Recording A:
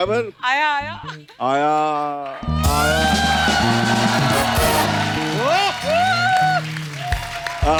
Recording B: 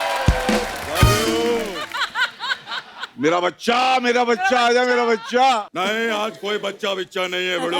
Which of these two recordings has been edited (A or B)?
B